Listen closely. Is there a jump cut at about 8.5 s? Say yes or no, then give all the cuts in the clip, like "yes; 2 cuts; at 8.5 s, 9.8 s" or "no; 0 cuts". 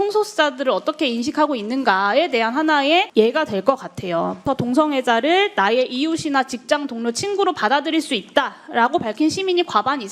no; 2 cuts; at 3.1 s, 4.4 s